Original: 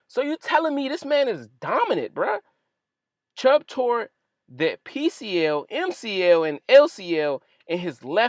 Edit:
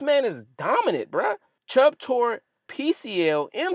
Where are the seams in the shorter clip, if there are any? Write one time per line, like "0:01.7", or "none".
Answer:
0:01.5
0:02.7